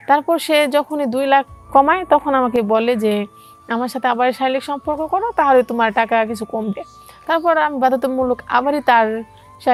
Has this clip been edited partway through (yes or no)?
no